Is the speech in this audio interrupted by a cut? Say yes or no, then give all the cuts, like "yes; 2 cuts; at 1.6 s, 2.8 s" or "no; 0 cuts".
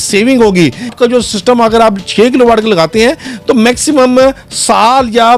yes; 1 cut; at 0.9 s